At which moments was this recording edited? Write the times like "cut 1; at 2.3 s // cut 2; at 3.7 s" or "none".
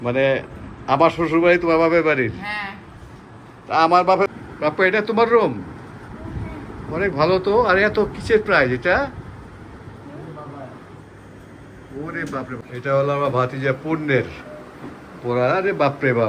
cut 1; at 4.3 s // cut 2; at 12.6 s